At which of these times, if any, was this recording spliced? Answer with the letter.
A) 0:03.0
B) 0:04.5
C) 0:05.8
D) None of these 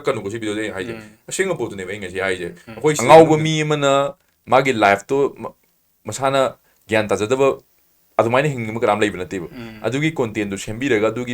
A